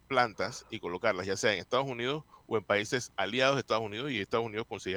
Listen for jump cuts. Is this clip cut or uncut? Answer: uncut